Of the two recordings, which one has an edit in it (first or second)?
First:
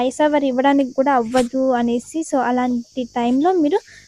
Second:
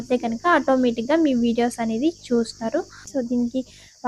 second